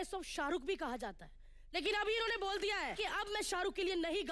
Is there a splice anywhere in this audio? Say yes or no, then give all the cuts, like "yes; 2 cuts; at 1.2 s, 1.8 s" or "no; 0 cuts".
yes; 2 cuts; at 1.5 s, 2.9 s